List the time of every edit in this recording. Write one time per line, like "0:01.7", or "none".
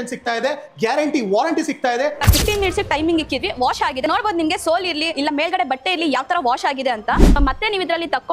0:02.2
0:07.4

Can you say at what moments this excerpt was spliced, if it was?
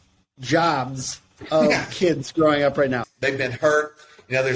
0:03.0

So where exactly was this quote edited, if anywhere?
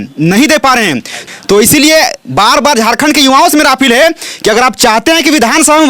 0:01.1

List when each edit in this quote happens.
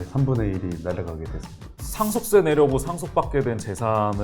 0:01.8

